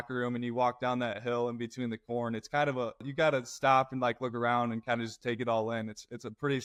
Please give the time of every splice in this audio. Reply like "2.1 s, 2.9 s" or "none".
none